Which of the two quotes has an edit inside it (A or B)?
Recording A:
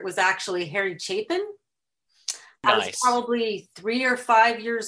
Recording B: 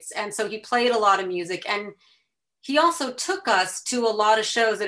A